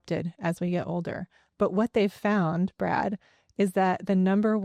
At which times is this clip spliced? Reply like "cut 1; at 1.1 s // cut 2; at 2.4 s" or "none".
none